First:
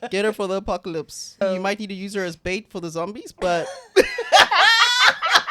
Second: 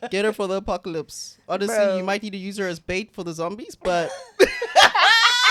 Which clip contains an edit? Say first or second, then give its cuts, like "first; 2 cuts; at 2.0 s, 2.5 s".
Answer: first; 1 cut; at 1.4 s